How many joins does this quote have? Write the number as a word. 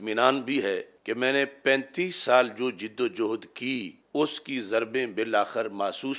two